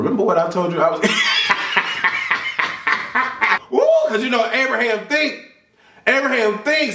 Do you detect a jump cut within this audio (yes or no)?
yes